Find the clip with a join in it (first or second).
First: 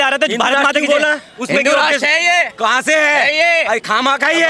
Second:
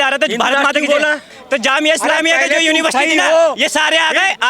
second